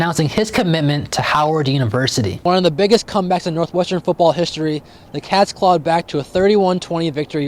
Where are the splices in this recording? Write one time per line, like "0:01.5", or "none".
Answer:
0:02.4

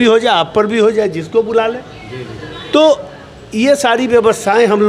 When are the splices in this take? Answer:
none

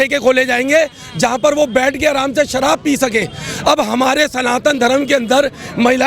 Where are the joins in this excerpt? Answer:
none

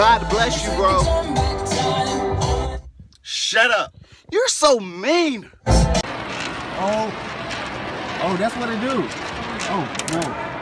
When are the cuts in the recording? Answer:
0:05.6

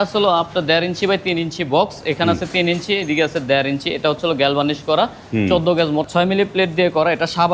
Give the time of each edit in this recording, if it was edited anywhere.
0:06.1

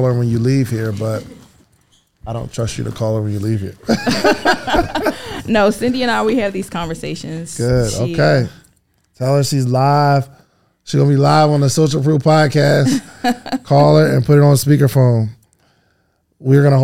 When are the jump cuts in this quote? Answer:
none

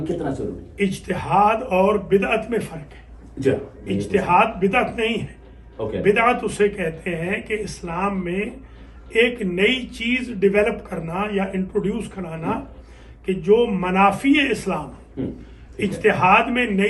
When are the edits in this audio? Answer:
none

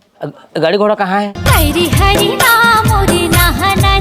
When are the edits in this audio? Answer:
0:01.4

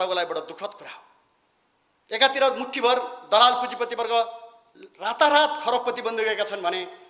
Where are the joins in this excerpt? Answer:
none

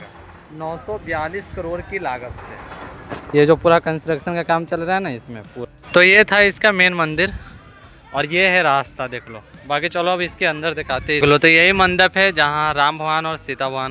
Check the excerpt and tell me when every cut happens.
0:05.6
0:11.2

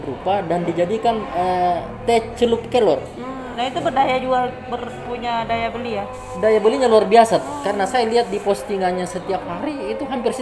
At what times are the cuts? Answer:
none

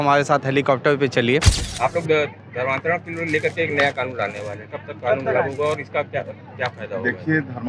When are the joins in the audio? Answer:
0:01.6

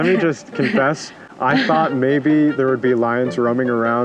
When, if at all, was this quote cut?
none

